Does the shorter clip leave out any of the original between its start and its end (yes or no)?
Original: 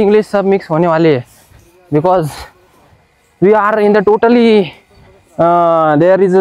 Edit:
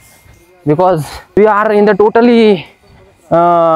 yes